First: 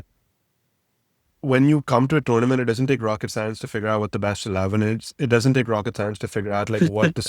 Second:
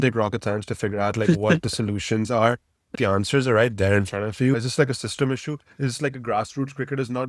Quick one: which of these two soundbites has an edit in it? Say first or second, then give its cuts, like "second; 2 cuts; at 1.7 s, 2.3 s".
second; 2 cuts; at 2.9 s, 4.5 s